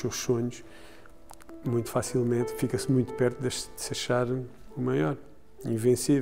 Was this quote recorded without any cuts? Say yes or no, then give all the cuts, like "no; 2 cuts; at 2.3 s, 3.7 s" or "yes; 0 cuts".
no; 1 cut; at 4.6 s